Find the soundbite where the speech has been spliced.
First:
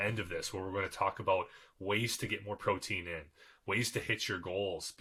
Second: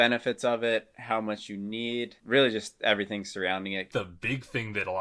second; 2 cuts; at 2.2 s, 3.9 s

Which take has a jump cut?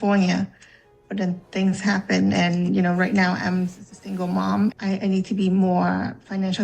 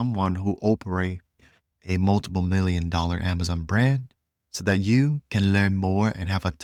first; 1 cut; at 4.7 s

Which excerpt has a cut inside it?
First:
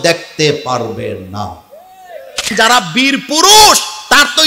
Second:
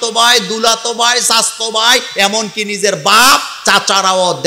first; 1 cut; at 2.5 s

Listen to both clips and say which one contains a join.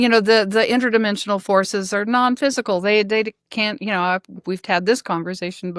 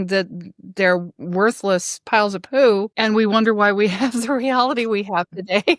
second; 1 cut; at 2.9 s

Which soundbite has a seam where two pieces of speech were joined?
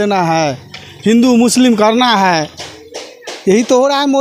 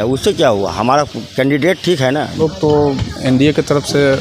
second; 1 cut; at 2.4 s

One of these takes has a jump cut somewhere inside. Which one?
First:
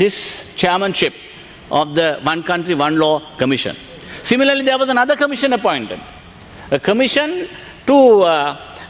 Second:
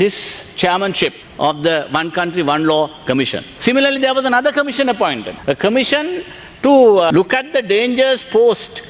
second; 4 cuts; at 1.2 s, 3.4 s, 5.3 s, 7.1 s

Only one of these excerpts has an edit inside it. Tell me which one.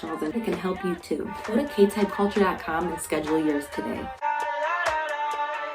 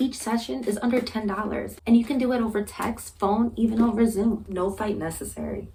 first; 1 cut; at 4.1 s

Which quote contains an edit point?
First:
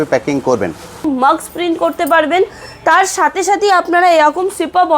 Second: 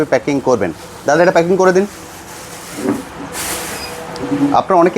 first; 1 cut; at 1.0 s

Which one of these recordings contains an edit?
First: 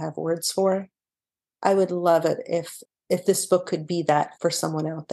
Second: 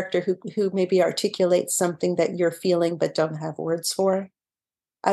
first; 2 cuts; at 2.7 s, 4.3 s

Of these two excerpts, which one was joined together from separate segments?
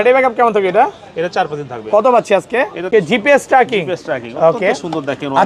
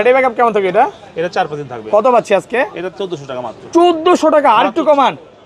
first; 1 cut; at 2.9 s

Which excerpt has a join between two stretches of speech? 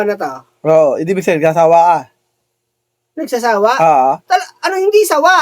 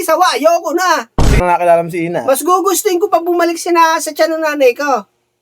second; 1 cut; at 1.4 s

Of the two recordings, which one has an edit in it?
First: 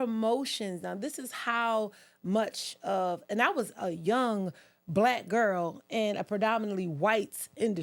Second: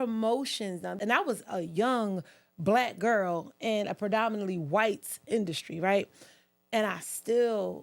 second; 1 cut; at 0.9 s

